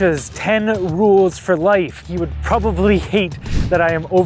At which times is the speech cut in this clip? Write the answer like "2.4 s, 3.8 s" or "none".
2.0 s